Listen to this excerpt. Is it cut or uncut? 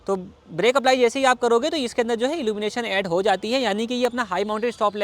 uncut